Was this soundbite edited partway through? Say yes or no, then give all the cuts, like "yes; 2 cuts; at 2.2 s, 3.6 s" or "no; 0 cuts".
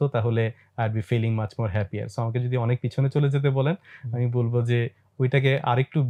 no; 0 cuts